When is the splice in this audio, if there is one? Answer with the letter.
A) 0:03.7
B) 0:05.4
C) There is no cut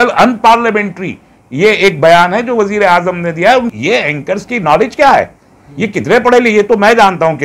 A